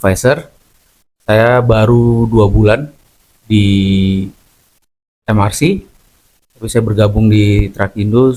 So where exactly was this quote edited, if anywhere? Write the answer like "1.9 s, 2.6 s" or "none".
none